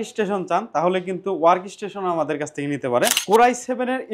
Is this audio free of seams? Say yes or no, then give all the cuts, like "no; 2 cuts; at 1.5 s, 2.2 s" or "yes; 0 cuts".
no; 1 cut; at 3.2 s